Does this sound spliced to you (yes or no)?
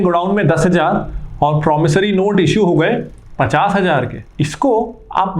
yes